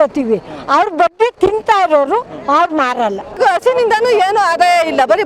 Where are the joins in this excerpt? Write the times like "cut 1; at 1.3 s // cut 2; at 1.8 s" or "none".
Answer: cut 1; at 3.4 s